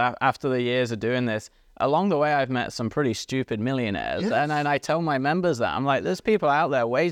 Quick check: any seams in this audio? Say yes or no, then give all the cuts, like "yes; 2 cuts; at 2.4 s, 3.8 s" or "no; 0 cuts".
no; 0 cuts